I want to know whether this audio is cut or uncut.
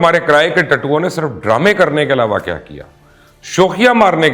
uncut